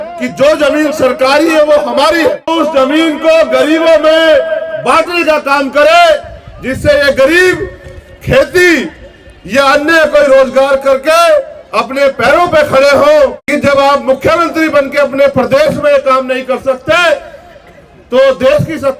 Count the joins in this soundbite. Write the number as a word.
two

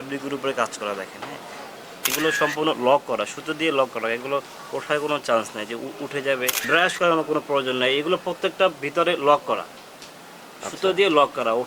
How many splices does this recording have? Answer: two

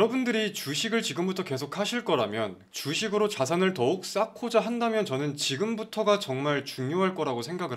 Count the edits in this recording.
one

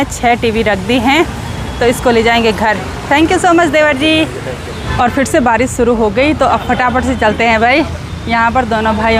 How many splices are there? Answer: zero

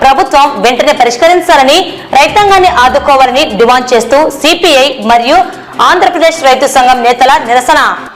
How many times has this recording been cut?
zero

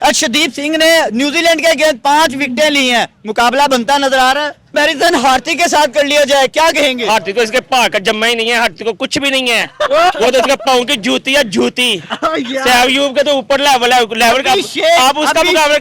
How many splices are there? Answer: one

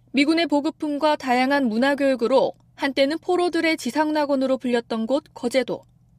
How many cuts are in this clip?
zero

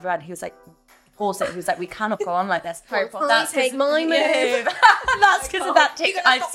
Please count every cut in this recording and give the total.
one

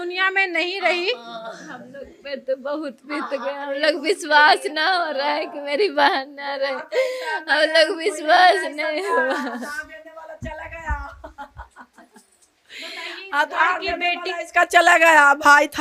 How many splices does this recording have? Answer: zero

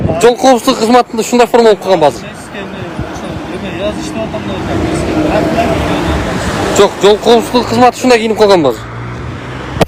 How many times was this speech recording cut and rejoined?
zero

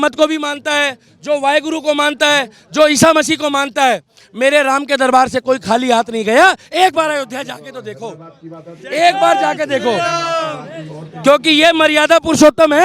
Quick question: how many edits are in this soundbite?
zero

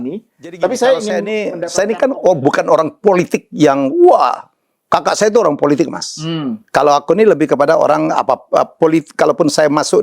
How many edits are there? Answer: one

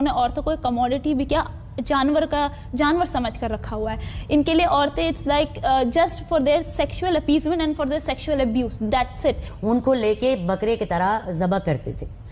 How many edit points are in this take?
one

